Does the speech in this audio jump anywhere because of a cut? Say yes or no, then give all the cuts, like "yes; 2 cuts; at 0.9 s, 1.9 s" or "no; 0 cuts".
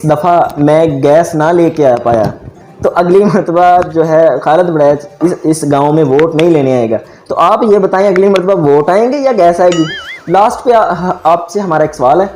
yes; 1 cut; at 10.1 s